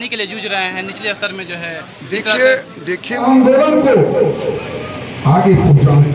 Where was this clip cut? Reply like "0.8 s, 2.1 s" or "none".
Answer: 3.1 s

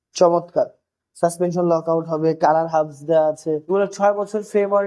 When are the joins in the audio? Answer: 3.7 s

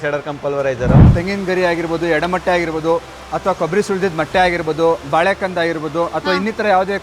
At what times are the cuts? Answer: 1.1 s

